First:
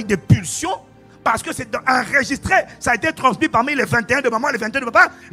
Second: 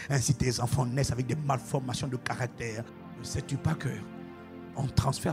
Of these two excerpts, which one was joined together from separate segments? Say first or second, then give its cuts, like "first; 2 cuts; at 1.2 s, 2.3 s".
second; 1 cut; at 2.9 s